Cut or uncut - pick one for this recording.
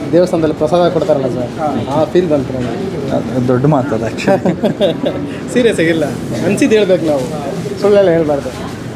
uncut